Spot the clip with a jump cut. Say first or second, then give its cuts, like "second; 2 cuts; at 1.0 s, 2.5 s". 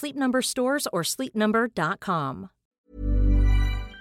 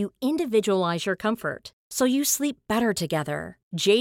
first; 1 cut; at 2.8 s